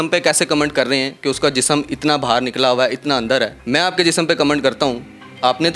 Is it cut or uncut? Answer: cut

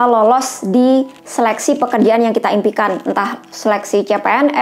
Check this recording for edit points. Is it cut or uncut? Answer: uncut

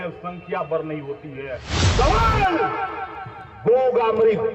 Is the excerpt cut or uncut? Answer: cut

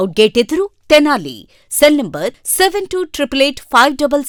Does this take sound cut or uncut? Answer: uncut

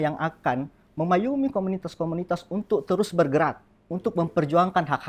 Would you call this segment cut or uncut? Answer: uncut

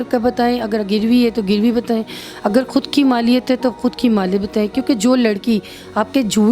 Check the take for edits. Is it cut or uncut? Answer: uncut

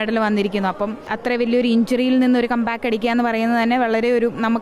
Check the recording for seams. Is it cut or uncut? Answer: cut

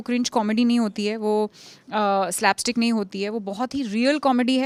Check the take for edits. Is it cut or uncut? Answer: uncut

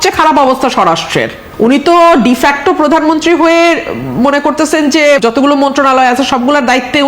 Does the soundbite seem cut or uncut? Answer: cut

